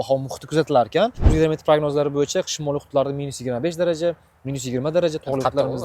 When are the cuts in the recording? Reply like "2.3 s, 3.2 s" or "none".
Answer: 1.2 s